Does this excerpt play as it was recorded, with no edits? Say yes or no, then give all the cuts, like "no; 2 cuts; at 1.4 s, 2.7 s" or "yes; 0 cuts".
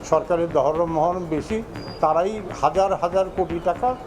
yes; 0 cuts